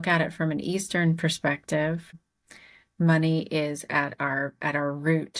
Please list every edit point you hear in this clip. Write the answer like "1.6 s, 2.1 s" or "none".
2.2 s